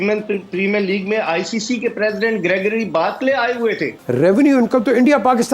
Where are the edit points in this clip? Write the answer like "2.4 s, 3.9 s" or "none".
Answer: 3.9 s